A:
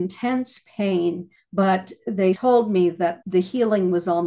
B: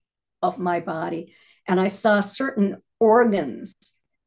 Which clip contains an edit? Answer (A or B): A